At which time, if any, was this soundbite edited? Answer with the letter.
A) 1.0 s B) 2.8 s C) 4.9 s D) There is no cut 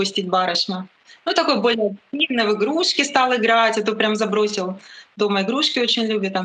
D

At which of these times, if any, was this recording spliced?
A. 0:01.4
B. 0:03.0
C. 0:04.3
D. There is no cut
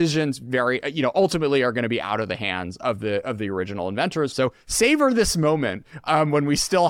C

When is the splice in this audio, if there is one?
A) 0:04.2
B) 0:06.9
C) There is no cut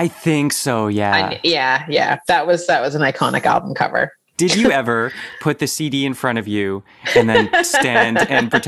A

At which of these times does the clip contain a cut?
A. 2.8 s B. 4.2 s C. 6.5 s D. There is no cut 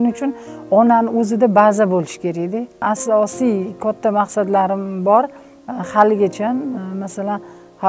A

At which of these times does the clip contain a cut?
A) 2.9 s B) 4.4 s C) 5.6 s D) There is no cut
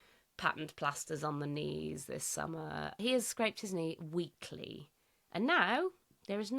A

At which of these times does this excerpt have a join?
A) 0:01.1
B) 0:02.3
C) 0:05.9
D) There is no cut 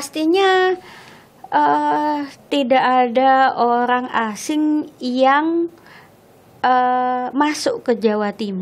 D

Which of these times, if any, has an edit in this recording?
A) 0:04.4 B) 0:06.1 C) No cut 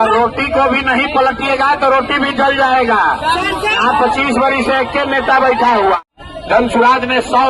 B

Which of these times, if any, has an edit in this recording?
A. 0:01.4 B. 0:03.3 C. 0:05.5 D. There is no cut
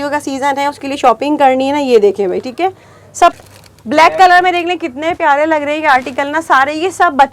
B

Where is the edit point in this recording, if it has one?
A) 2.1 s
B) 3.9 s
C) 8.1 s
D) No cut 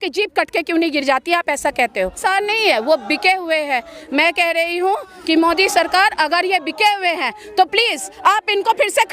A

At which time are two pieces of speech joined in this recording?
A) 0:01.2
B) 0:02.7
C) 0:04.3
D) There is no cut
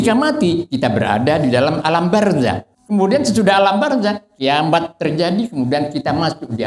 B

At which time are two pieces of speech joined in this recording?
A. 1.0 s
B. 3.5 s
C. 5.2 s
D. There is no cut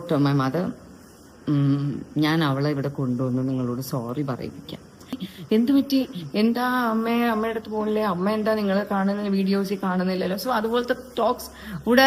C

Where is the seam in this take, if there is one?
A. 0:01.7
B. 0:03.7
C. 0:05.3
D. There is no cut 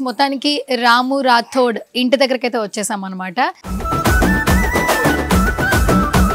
B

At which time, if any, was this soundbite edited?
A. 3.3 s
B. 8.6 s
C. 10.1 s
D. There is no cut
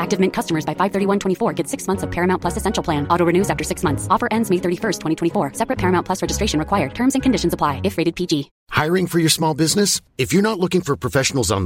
B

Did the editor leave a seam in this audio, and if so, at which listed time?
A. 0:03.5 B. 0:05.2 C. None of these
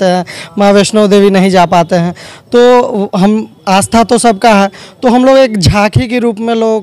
C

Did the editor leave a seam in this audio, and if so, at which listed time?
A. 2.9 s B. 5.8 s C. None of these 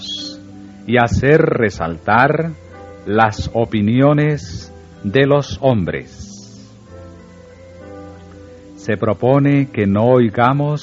C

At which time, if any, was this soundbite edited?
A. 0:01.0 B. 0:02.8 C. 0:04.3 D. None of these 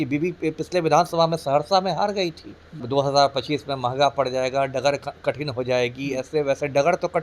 B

